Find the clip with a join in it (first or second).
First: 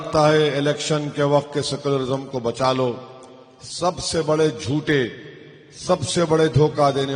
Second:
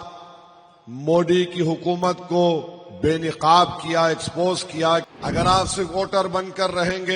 second